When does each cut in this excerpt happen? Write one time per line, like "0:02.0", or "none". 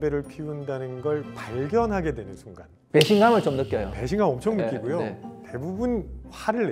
none